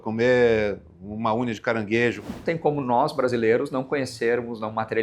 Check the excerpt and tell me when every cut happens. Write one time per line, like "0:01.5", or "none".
0:02.3